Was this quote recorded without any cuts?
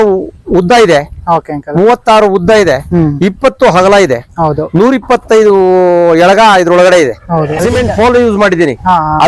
no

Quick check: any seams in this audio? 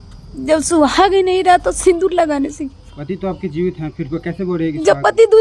no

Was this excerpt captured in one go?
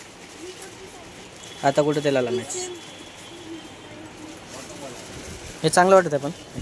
yes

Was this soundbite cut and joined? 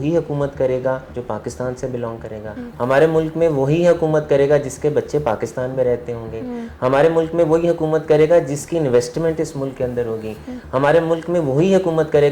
yes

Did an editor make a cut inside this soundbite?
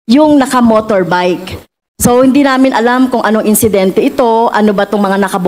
no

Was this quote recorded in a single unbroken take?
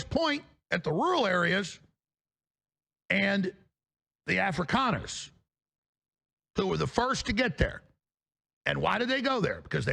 yes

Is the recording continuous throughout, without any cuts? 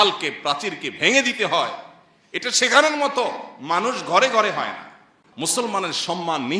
no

